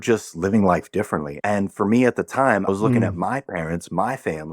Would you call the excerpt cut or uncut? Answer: cut